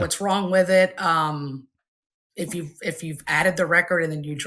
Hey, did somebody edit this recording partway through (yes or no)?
no